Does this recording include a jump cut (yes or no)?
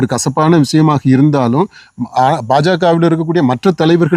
no